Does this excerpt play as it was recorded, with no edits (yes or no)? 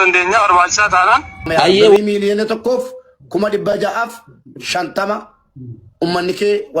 no